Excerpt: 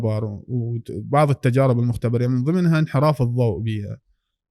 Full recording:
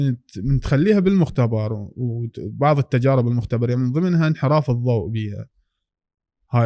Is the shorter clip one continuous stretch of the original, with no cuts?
yes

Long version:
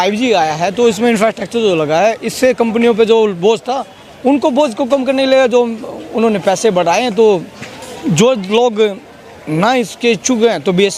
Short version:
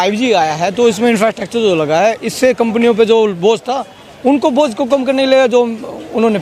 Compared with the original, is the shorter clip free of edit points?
yes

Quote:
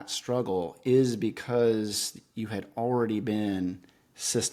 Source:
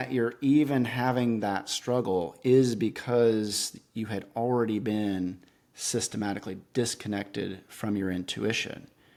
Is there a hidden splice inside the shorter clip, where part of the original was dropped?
no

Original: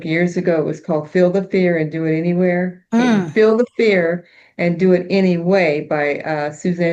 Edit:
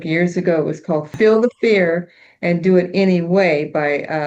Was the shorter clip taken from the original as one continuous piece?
no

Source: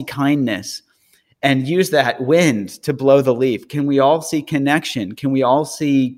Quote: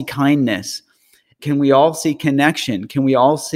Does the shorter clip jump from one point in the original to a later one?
yes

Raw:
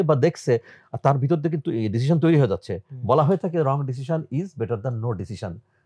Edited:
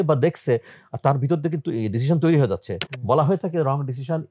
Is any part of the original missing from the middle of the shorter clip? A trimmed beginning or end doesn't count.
no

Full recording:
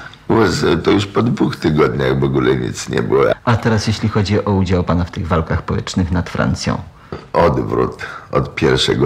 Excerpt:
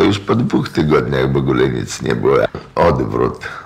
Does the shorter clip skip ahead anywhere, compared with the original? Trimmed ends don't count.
yes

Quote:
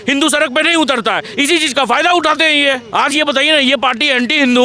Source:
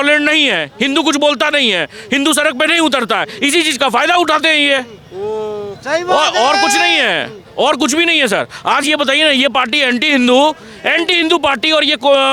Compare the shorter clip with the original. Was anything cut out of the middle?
yes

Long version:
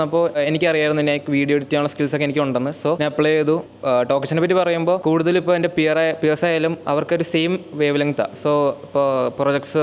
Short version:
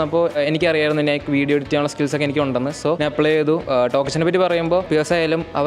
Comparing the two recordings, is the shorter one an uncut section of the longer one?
no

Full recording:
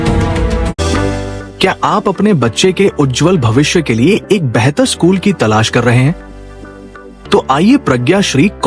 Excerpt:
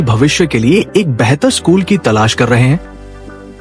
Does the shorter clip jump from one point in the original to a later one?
no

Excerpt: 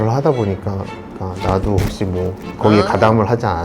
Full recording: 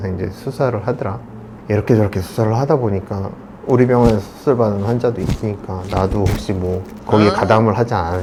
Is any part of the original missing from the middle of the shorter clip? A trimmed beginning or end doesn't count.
yes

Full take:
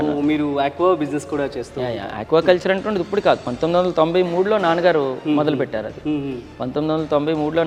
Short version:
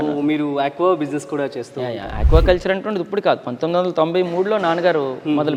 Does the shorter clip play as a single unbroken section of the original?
yes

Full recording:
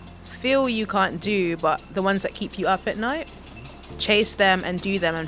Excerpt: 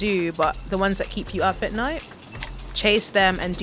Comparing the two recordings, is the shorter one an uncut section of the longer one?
yes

